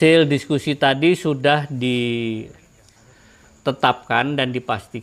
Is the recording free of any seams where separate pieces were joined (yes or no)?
yes